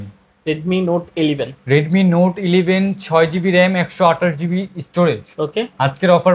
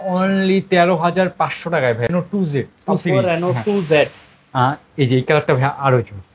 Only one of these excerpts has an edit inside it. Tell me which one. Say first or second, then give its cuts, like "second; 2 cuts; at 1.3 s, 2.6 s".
second; 1 cut; at 2.1 s